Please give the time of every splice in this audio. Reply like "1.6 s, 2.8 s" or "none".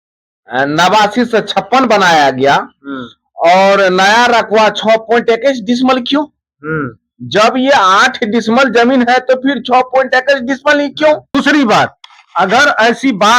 11.3 s